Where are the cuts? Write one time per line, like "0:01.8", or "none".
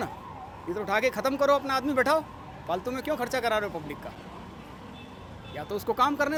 none